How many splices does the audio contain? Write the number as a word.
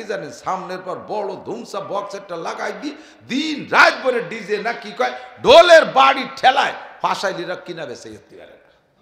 zero